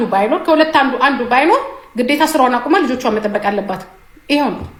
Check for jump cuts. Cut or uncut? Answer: uncut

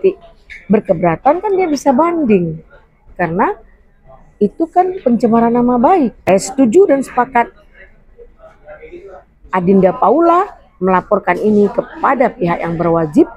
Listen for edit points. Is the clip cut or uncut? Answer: cut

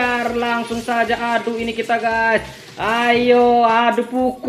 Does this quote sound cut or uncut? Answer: uncut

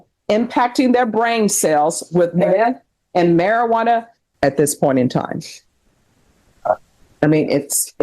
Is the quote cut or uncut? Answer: cut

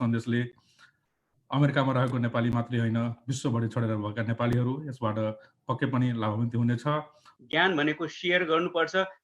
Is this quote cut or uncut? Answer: cut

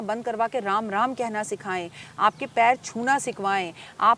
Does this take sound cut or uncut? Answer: uncut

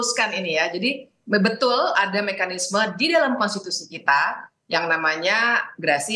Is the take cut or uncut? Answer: uncut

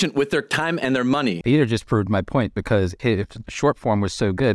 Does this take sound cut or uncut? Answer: cut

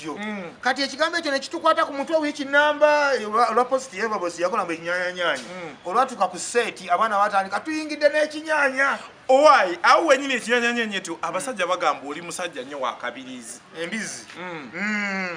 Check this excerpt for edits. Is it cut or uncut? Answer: uncut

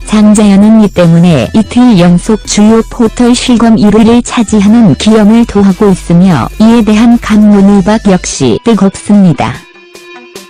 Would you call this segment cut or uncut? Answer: uncut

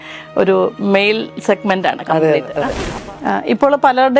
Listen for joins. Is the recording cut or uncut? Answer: cut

